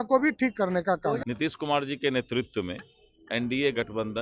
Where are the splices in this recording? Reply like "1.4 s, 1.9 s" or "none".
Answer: 1.2 s